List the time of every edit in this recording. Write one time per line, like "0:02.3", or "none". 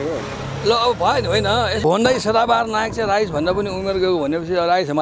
0:01.8